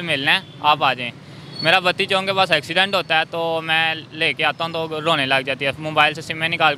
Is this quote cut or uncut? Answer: uncut